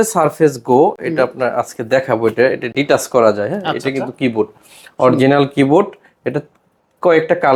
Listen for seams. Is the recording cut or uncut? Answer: uncut